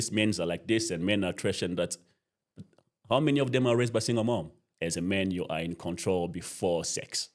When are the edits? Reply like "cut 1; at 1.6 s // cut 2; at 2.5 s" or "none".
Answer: cut 1; at 4.6 s

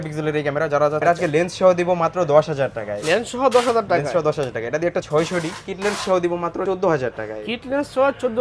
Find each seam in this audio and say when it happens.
cut 1; at 1.0 s // cut 2; at 5.1 s // cut 3; at 6.6 s

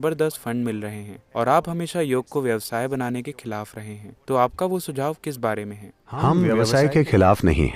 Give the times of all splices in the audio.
cut 1; at 6.5 s

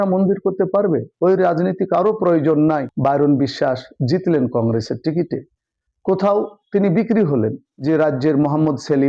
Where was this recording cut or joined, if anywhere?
cut 1; at 2.9 s // cut 2; at 7.7 s

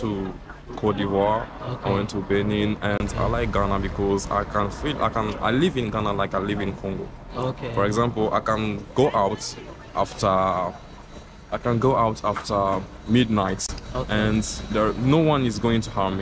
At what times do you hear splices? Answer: none

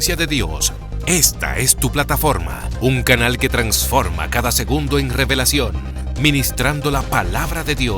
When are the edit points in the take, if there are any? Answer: none

